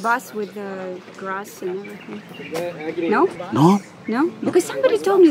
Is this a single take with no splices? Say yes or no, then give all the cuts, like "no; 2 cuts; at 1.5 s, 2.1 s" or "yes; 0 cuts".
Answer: no; 1 cut; at 3.4 s